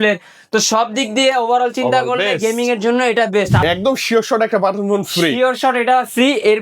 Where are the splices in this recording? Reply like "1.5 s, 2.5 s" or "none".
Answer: 3.6 s